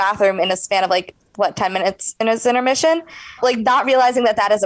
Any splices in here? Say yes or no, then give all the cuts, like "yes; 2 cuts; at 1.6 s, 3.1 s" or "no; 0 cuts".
yes; 1 cut; at 3.4 s